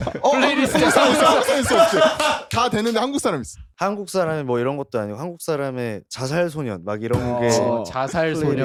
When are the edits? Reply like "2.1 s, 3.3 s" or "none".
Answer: none